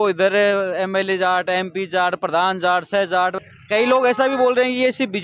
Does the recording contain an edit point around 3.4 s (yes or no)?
yes